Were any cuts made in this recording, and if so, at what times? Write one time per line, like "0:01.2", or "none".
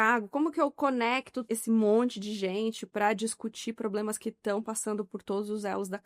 0:01.3